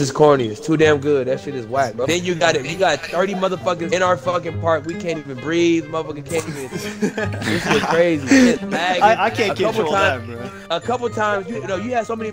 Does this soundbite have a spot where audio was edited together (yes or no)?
no